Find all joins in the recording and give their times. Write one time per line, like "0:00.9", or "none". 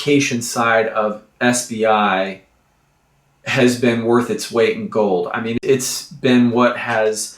0:05.5